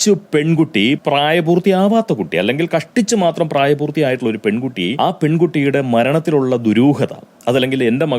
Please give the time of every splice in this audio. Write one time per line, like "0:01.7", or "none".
0:01.0
0:04.9